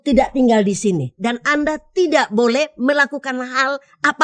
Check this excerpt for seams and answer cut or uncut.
uncut